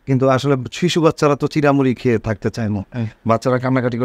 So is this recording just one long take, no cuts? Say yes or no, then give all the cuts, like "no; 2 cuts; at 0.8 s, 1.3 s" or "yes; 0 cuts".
yes; 0 cuts